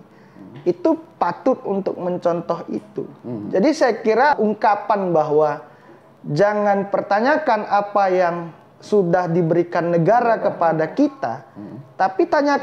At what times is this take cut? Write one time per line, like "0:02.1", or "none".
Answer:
0:04.3

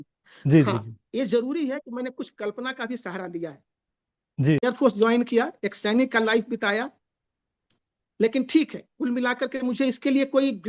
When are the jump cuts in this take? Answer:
0:04.7

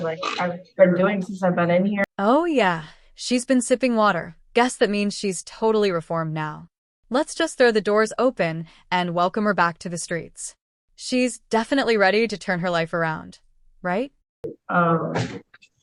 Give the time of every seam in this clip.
none

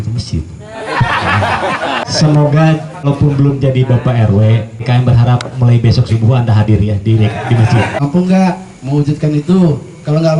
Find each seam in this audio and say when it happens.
0:02.0
0:03.1
0:04.8
0:08.0

